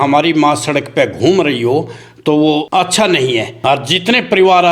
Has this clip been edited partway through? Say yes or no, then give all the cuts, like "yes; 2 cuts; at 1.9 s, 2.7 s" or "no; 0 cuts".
yes; 2 cuts; at 2.7 s, 3.5 s